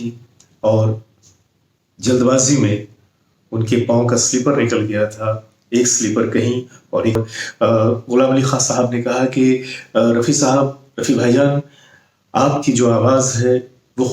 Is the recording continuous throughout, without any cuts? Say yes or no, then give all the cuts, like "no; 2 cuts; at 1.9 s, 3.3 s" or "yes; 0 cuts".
no; 1 cut; at 7.2 s